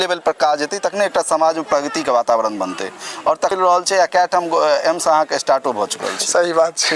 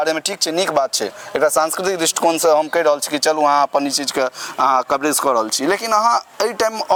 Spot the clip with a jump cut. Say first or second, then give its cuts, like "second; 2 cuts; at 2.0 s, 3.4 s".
first; 1 cut; at 3.5 s